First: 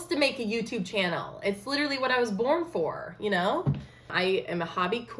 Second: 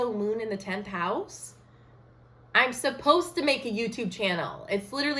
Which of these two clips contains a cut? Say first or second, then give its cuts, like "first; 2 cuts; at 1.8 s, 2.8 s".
first; 1 cut; at 4.1 s